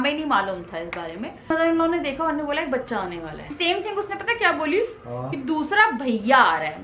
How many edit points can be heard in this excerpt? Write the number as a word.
two